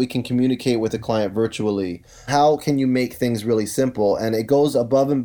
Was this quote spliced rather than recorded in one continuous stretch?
yes; 1 cut; at 2.3 s

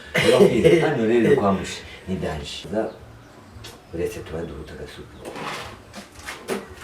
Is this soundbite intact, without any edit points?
no; 1 cut; at 2.6 s

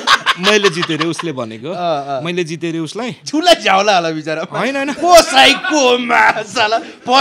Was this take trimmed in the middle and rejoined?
no; 0 cuts

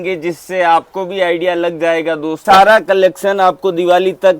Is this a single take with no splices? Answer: no; 1 cut; at 2.4 s

